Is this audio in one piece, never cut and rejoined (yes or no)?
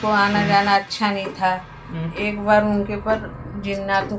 yes